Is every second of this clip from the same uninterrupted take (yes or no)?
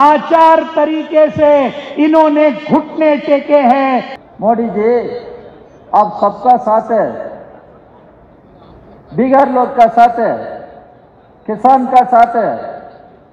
no